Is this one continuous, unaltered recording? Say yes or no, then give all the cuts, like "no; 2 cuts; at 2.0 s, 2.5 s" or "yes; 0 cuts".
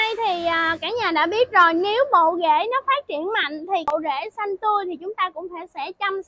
no; 1 cut; at 3.9 s